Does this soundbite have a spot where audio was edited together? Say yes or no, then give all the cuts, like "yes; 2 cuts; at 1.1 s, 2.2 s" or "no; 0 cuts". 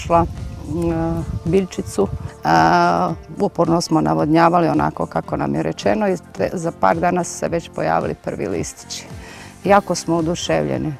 yes; 1 cut; at 2.3 s